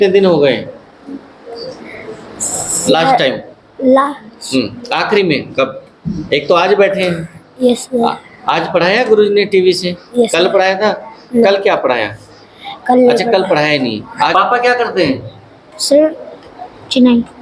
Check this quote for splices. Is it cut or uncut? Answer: cut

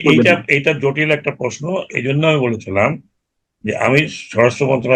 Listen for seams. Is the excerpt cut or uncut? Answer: uncut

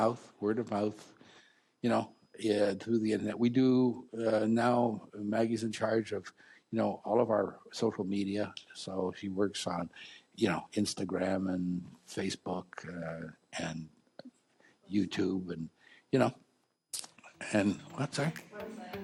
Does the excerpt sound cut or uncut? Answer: uncut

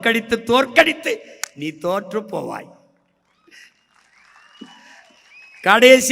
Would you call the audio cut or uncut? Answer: uncut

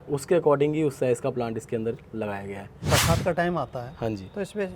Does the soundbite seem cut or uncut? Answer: cut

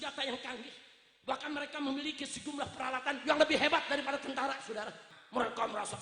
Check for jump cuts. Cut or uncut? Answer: cut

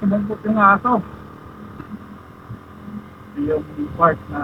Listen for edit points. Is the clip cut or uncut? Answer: cut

